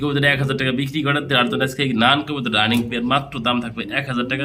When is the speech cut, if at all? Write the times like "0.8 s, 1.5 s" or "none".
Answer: none